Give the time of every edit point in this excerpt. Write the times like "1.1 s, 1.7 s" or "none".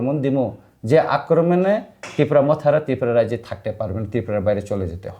none